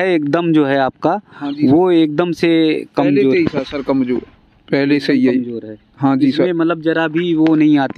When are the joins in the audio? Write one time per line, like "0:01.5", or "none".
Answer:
none